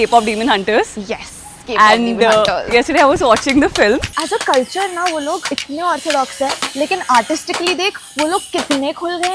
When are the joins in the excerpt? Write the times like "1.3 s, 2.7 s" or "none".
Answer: 4.1 s, 5.4 s

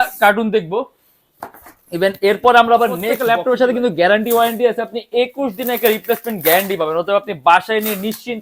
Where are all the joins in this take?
3.2 s

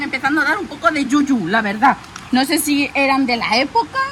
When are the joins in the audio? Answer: none

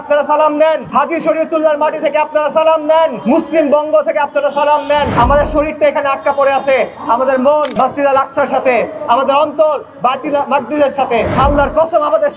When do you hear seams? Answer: 0.8 s, 3.2 s, 5.1 s, 7.7 s, 11.3 s

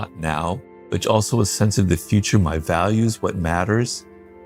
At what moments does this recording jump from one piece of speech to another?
none

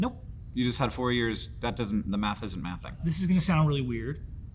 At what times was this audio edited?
3.0 s

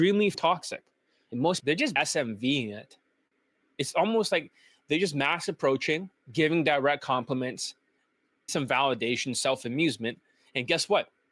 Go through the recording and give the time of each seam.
1.6 s

